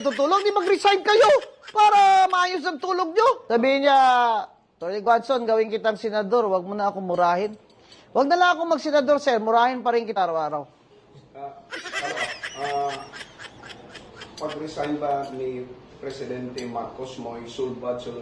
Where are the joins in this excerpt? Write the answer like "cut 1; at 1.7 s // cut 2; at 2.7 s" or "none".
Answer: cut 1; at 3.4 s

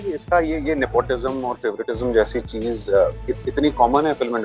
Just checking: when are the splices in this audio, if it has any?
none

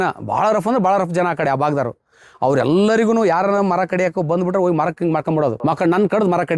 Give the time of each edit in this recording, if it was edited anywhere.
cut 1; at 5.6 s

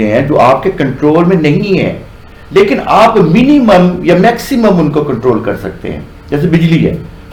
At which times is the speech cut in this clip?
none

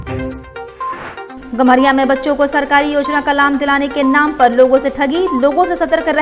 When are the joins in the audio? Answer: cut 1; at 1.4 s

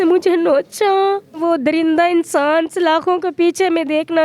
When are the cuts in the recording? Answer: cut 1; at 1.4 s

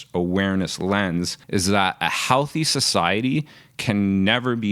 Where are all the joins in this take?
cut 1; at 1.4 s

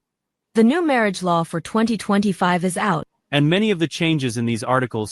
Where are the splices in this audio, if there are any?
cut 1; at 3.1 s

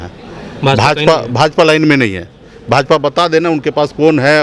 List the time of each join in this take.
none

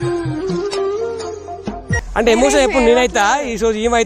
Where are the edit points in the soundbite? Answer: cut 1; at 2.0 s

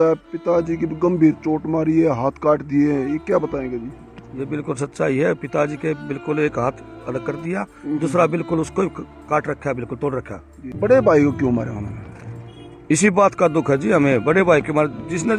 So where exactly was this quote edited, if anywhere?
cut 1; at 10.7 s

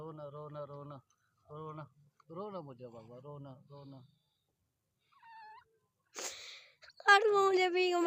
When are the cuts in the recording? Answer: none

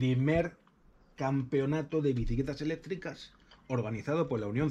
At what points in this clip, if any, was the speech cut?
none

